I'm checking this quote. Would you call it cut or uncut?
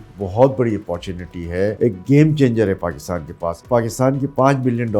cut